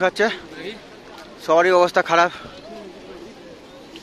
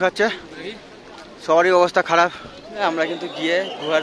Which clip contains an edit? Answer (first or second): second